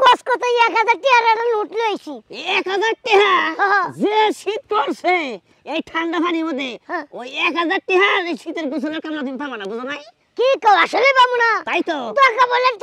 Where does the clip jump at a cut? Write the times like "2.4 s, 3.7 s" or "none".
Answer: none

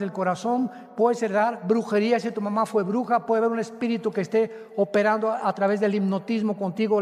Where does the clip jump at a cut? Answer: none

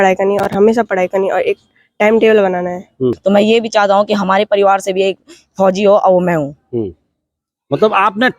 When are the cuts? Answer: 3.2 s

